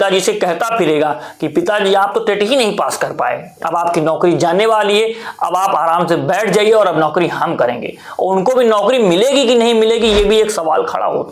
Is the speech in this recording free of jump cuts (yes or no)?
yes